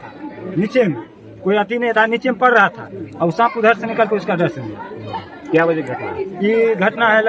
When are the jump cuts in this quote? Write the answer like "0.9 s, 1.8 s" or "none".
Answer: none

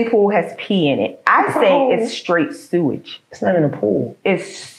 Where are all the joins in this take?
none

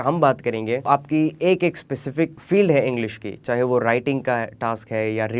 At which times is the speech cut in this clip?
0.9 s, 2.4 s

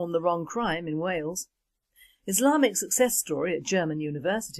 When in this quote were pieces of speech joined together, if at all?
none

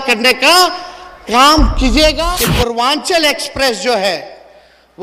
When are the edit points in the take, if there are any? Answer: 2.2 s

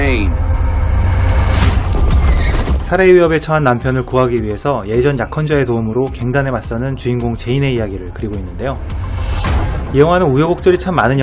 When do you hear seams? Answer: 7.2 s

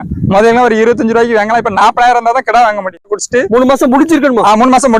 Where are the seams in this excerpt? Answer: 3.2 s

